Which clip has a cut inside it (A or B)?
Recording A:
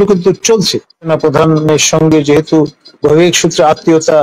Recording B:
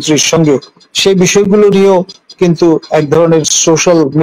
A